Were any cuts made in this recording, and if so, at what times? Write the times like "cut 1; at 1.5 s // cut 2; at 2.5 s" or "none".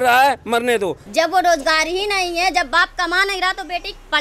cut 1; at 1.0 s